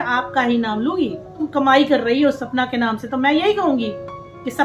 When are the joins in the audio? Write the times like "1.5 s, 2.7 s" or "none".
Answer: 1.4 s